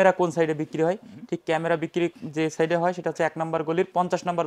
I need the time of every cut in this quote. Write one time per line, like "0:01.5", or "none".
none